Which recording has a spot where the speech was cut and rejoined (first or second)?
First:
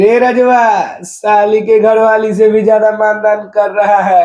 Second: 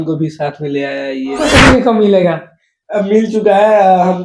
second